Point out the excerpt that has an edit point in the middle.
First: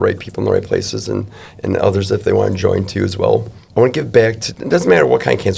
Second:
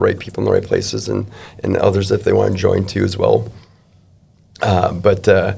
first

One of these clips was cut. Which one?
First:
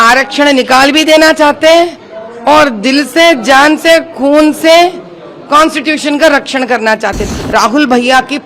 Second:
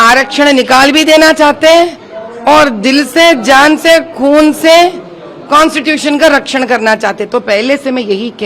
first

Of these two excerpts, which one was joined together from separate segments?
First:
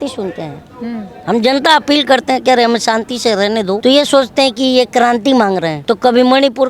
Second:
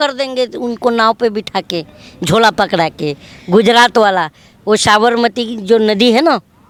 first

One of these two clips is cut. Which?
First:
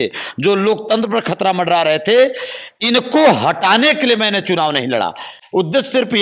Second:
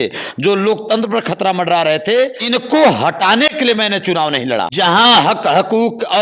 second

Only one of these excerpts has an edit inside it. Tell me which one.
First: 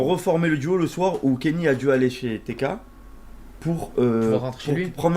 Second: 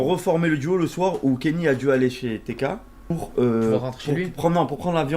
second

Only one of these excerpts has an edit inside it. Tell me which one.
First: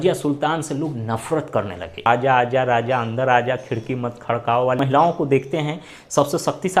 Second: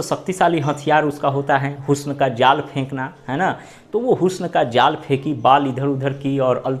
first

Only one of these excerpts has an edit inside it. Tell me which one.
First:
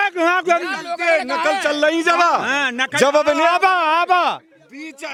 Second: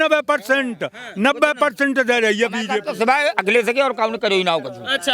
second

